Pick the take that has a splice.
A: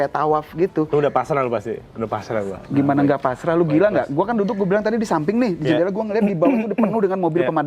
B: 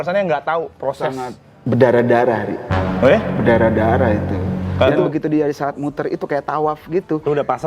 B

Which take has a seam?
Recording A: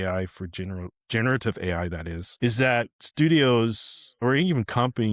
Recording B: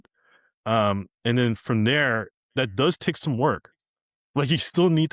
A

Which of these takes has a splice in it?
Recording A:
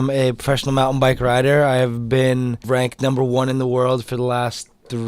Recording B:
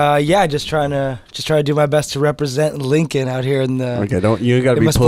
A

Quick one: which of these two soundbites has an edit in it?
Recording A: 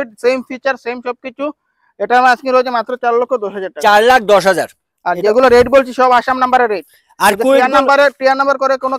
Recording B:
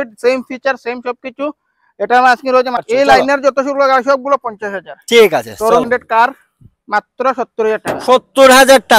B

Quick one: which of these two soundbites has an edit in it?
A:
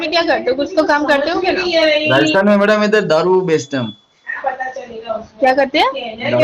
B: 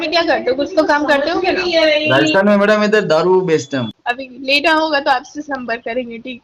B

